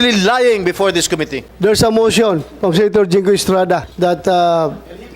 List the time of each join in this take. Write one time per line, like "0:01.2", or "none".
0:01.4
0:03.9